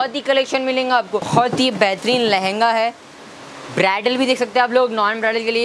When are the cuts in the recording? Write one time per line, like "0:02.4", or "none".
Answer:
0:01.3